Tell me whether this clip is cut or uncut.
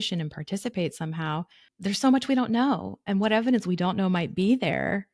uncut